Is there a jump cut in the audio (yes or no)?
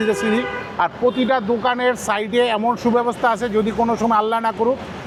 no